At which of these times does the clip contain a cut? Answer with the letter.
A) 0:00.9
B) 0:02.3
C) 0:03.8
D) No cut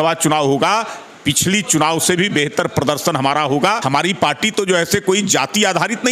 C